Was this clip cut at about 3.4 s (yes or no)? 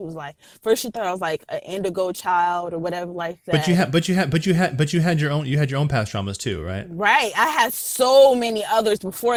no